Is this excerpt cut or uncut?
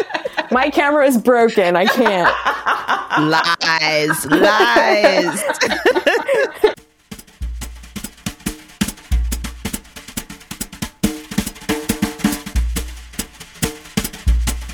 cut